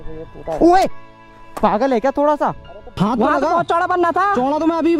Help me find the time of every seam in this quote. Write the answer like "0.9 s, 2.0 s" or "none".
2.9 s